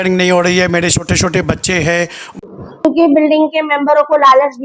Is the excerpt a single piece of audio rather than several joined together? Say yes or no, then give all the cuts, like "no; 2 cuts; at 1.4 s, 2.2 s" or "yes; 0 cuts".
no; 1 cut; at 2.3 s